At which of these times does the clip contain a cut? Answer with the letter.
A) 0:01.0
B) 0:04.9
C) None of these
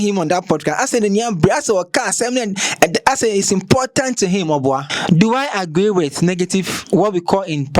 B